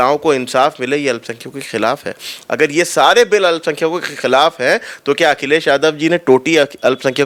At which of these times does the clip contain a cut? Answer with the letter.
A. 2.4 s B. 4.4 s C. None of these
C